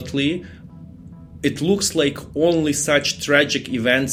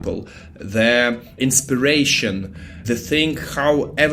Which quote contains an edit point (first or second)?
second